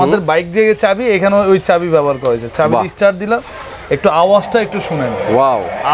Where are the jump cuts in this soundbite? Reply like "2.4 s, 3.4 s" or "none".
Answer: none